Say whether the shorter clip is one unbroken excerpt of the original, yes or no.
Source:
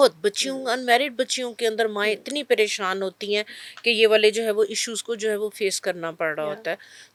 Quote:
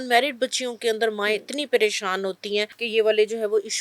no